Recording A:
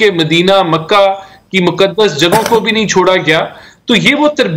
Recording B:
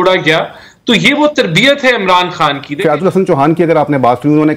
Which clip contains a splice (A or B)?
B